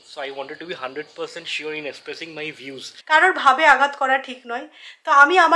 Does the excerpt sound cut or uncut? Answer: cut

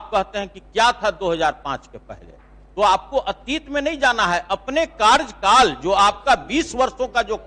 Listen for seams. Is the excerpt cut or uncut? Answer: uncut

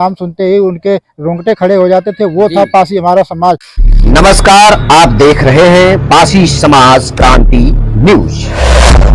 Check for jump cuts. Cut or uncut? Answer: cut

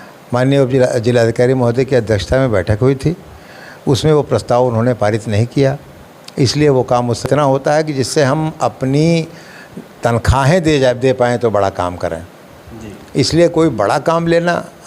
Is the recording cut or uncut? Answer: cut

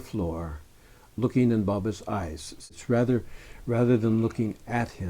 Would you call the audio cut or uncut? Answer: cut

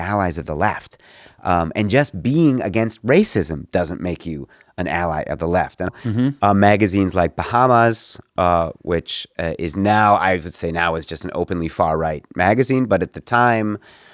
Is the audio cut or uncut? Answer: cut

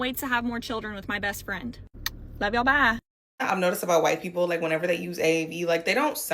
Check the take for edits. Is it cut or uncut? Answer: cut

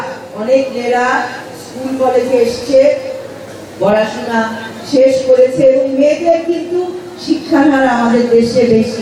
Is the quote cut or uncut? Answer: uncut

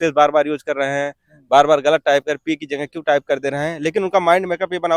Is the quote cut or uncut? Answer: uncut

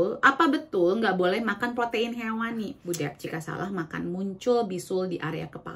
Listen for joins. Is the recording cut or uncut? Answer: cut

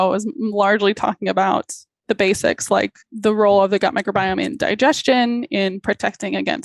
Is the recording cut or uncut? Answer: cut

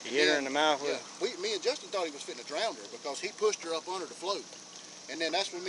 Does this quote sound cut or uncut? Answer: cut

